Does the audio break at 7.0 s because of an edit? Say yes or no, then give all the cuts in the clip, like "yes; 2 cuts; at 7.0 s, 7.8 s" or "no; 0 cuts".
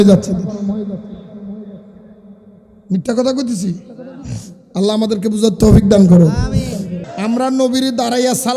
yes; 1 cut; at 7.0 s